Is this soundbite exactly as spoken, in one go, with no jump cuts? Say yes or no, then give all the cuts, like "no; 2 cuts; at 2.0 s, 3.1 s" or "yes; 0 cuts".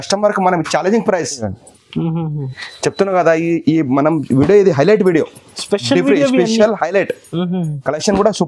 no; 1 cut; at 1.4 s